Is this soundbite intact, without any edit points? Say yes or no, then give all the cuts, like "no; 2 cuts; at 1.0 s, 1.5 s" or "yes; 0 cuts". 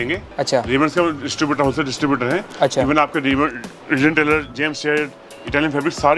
yes; 0 cuts